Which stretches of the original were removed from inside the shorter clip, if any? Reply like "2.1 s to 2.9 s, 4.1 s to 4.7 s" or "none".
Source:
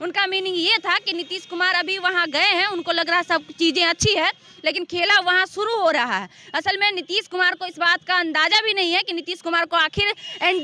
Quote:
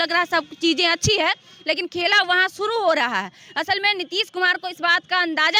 none